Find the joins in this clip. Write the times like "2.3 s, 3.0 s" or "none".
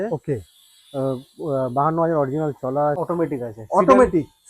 3.0 s